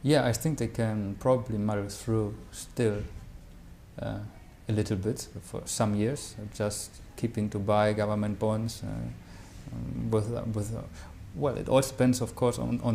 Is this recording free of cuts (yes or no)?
yes